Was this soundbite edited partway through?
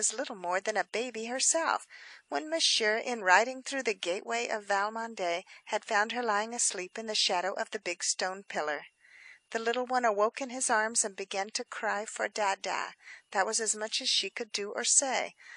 no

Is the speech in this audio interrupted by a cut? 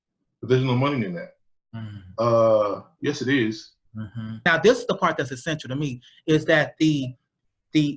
yes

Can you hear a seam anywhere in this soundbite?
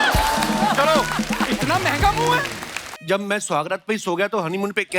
yes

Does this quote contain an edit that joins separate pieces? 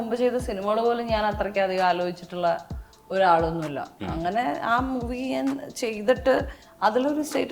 no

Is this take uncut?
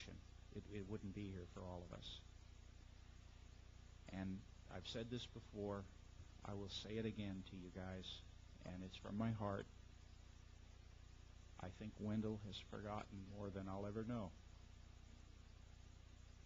yes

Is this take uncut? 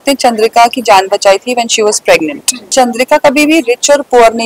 no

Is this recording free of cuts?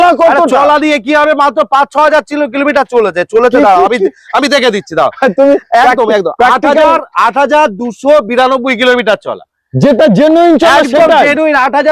yes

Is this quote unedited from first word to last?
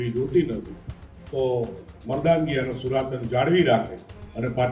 yes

